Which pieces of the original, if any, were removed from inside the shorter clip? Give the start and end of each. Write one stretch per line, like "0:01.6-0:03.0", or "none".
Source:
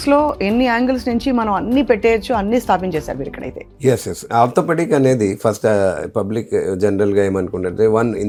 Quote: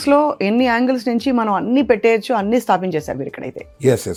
none